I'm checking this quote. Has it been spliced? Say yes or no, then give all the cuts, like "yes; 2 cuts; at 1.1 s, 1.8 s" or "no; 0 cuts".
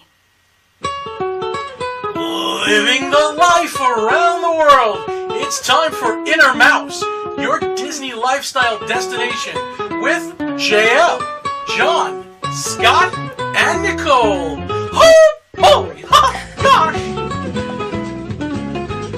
no; 0 cuts